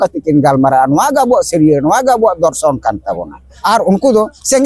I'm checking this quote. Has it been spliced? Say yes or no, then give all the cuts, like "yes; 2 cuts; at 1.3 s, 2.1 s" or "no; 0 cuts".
yes; 1 cut; at 3.3 s